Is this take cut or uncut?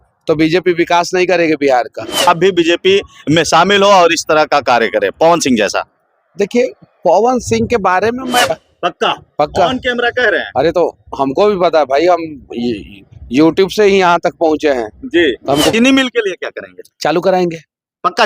cut